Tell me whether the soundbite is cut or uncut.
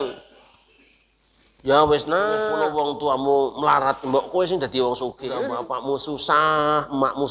cut